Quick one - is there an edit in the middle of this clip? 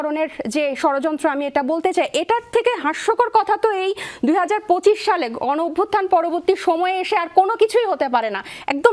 no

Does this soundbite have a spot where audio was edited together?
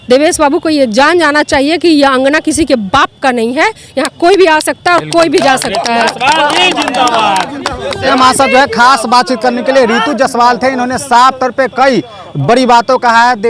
no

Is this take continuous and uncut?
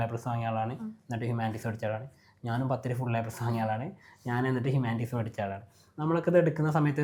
yes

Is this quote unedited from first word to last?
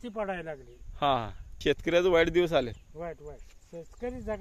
no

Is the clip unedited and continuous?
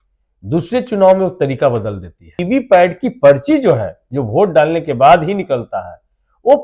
no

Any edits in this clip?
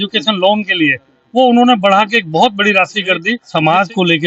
yes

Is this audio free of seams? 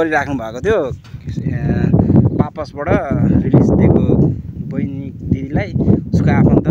yes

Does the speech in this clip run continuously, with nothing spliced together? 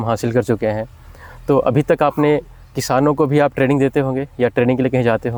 yes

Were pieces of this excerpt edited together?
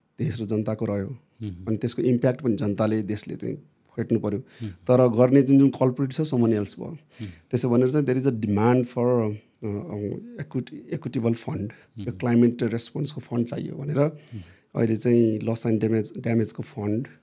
no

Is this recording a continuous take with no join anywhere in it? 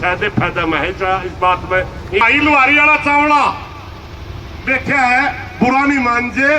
no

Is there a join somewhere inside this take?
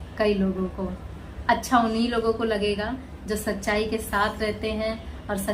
no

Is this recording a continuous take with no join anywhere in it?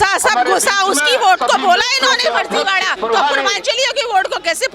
no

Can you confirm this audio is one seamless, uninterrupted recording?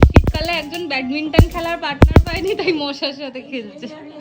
yes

